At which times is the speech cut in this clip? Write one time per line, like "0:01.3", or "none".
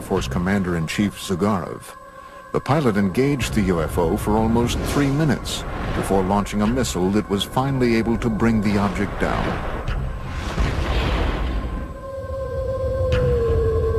none